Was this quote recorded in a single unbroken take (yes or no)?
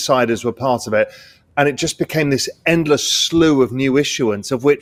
yes